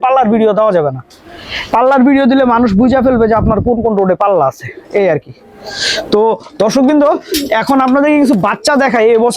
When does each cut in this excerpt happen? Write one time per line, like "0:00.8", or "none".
none